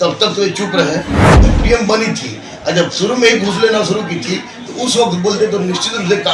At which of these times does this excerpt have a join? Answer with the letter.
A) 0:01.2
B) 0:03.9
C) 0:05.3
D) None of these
A